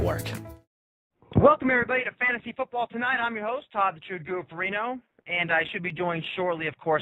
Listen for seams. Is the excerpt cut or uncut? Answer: uncut